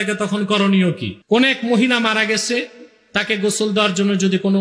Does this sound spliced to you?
yes; 1 cut; at 1.1 s

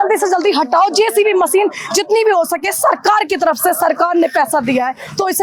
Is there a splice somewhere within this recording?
no; 0 cuts

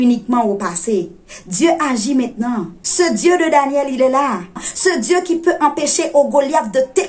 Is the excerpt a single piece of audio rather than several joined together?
no; 2 cuts; at 2.8 s, 4.7 s

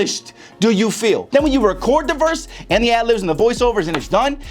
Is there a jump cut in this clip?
yes; 1 cut; at 1.2 s

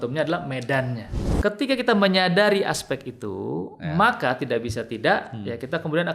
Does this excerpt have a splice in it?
yes; 1 cut; at 1.1 s

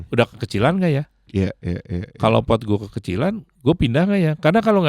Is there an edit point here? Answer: yes; 1 cut; at 1.2 s

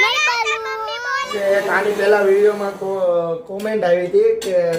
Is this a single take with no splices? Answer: no; 1 cut; at 1.3 s

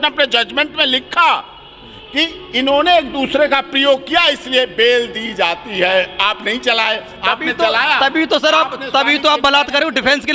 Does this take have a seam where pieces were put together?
no; 0 cuts

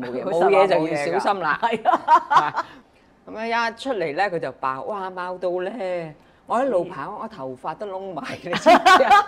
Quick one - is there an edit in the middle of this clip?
yes; 1 cut; at 2.8 s

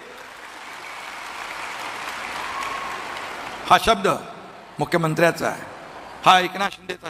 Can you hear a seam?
no; 0 cuts

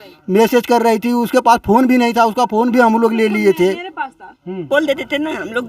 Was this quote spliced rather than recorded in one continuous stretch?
yes; 1 cut; at 4.7 s

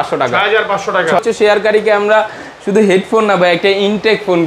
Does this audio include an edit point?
yes; 1 cut; at 1.2 s

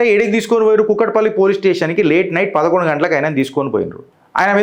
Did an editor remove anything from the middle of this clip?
no; 0 cuts

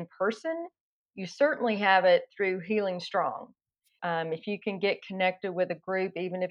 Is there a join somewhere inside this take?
yes; 1 cut; at 3.9 s

